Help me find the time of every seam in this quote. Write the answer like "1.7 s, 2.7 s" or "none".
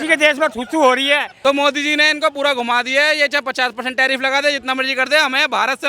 1.3 s